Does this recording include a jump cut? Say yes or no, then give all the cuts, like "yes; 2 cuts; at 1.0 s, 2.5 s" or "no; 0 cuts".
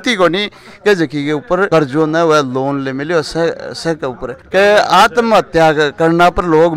yes; 1 cut; at 4.3 s